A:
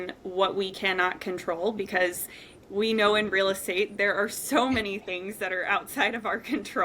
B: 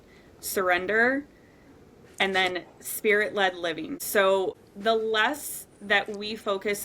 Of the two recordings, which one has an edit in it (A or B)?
B